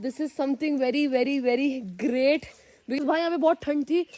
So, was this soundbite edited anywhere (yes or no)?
yes